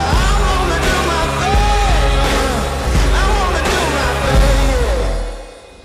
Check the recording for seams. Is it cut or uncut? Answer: uncut